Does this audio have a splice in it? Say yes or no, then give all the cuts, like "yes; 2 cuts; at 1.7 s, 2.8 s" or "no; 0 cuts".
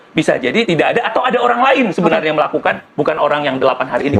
no; 0 cuts